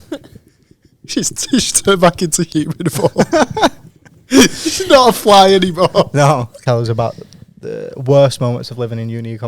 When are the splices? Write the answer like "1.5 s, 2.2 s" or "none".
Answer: 6.6 s